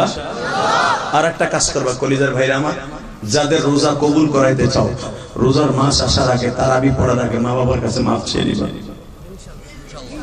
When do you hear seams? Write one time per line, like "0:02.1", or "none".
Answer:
none